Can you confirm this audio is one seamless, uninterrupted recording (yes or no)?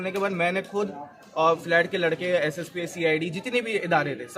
yes